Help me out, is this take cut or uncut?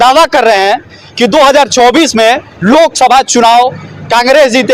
uncut